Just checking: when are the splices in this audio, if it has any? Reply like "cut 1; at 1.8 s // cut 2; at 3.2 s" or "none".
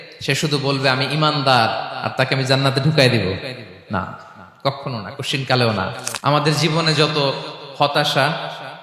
cut 1; at 6.1 s